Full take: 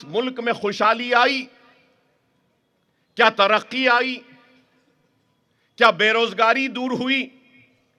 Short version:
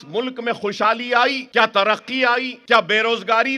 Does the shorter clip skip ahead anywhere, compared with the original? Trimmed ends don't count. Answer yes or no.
yes